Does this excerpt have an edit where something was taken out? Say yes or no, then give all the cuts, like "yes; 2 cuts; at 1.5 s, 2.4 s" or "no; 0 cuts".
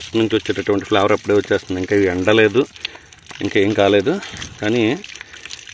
no; 0 cuts